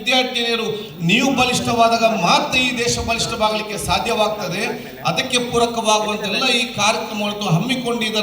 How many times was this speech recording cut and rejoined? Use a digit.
0